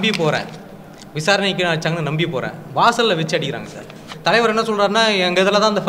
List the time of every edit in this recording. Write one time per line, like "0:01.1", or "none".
0:04.1